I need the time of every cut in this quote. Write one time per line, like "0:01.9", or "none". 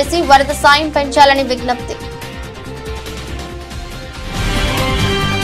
0:02.9